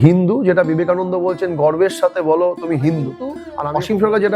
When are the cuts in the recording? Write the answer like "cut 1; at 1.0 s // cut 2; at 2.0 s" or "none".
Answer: cut 1; at 3.5 s